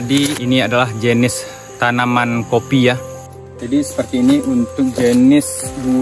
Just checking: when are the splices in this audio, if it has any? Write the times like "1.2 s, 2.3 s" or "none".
3.1 s